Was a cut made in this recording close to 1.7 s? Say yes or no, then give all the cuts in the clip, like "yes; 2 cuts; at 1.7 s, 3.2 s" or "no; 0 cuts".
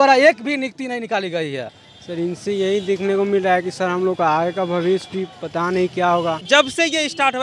yes; 2 cuts; at 1.7 s, 6.4 s